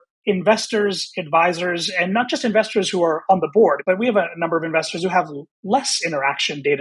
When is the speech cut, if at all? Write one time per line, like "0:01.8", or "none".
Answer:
0:03.8